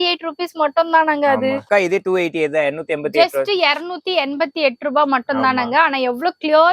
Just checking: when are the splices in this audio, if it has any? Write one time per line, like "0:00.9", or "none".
0:01.7

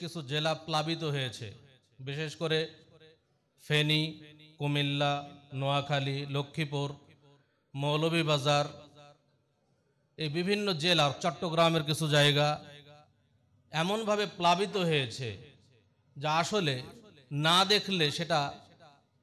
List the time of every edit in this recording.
none

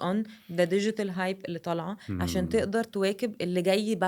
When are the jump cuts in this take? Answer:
none

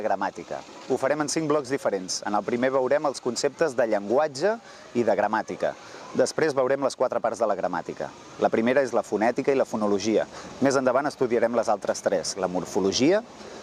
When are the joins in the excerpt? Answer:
0:11.0

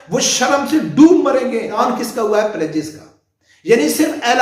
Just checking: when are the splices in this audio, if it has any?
0:01.8

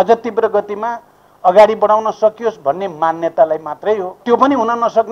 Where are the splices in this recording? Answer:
0:04.2

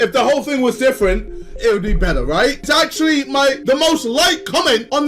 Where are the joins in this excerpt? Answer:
0:02.6

